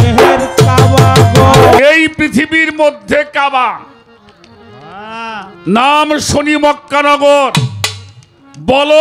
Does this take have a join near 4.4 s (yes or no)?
no